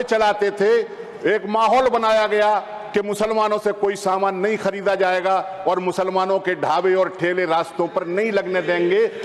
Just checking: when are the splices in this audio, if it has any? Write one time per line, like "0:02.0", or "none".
none